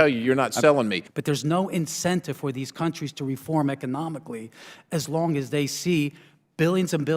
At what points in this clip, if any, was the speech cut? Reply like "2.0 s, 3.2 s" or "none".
1.0 s